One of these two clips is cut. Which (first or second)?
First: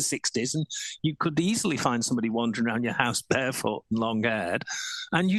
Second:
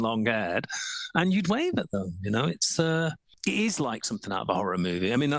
second